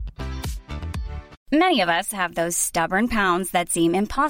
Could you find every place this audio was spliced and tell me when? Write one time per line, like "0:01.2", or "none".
0:01.3